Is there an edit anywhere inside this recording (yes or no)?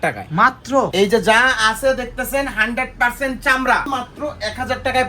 yes